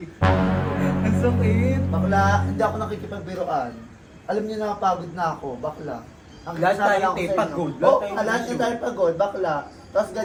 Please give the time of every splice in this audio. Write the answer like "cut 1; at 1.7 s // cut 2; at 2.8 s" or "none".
none